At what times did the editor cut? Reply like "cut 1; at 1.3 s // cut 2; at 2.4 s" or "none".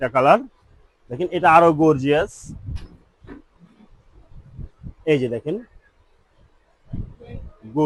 none